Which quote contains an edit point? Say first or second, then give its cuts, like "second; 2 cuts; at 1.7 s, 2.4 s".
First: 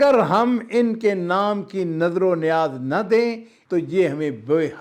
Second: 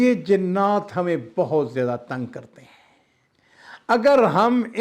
first; 1 cut; at 3.5 s